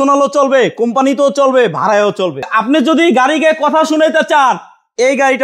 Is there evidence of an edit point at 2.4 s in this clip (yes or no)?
yes